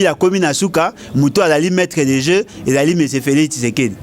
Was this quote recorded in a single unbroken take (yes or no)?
yes